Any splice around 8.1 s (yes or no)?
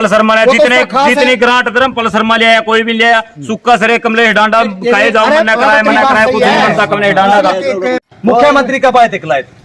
yes